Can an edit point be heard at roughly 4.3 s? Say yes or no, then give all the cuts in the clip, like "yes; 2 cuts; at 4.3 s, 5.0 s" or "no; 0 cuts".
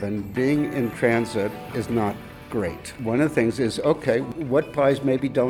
yes; 2 cuts; at 3.0 s, 4.3 s